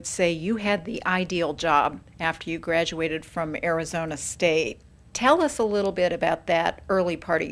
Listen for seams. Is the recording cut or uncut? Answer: cut